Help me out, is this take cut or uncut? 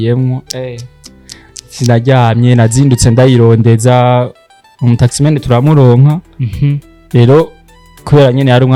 uncut